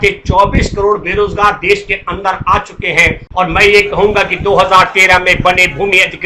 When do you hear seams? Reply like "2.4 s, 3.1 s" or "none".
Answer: 3.2 s